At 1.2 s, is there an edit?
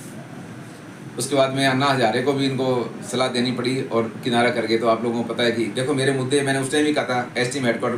no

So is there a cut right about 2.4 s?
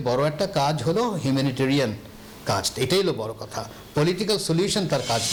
no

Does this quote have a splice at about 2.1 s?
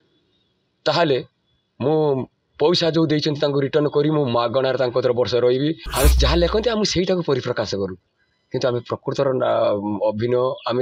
no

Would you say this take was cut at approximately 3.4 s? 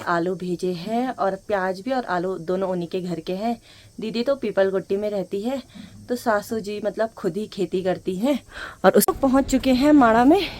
no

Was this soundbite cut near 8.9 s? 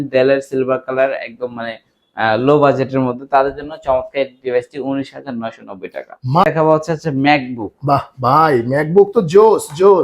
no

